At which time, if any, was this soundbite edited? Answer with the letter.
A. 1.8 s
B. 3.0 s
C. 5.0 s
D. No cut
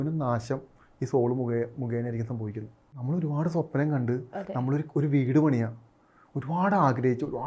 B